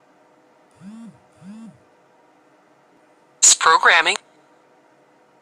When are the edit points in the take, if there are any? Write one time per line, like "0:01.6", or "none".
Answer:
0:03.0